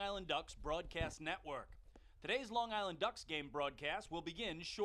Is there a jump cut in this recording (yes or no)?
no